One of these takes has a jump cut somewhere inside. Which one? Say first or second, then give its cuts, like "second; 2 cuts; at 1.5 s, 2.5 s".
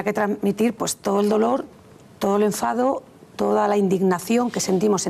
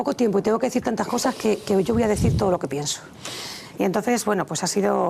second; 1 cut; at 3.4 s